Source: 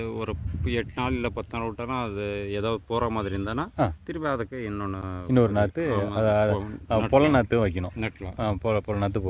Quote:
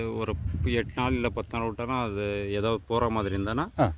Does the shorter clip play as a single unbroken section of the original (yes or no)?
yes